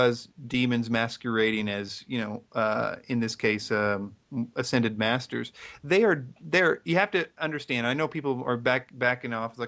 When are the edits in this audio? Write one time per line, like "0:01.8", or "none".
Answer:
0:01.3